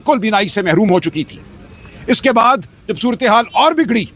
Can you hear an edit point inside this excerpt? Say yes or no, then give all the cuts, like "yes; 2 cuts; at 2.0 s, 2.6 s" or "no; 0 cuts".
no; 0 cuts